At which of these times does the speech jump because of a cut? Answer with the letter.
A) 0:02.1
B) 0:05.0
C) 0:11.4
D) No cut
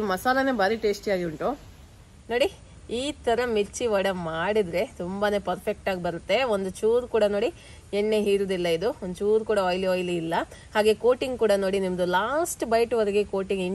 A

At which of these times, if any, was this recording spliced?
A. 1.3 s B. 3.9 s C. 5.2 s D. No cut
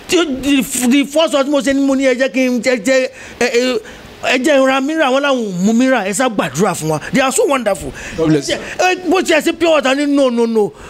D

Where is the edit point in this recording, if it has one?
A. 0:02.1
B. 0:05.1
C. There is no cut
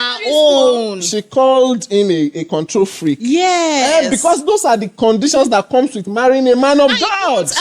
C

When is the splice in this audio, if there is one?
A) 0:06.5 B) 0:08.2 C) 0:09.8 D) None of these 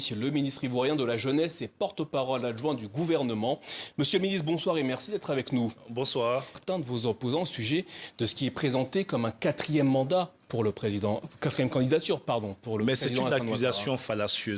A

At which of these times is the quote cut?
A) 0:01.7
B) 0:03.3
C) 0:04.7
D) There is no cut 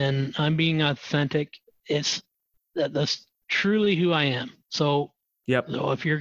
A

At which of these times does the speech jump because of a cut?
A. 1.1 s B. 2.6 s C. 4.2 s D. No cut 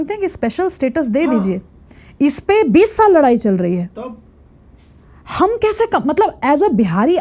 D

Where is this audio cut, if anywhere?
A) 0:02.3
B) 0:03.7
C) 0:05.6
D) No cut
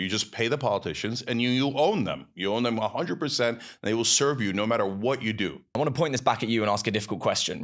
C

